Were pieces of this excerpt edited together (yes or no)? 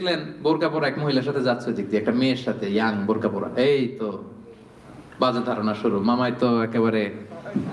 no